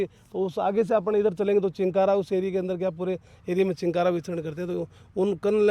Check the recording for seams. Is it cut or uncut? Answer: uncut